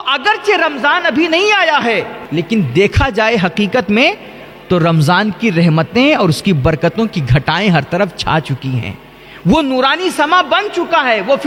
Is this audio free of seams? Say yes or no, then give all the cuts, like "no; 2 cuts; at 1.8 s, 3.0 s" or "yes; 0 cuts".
yes; 0 cuts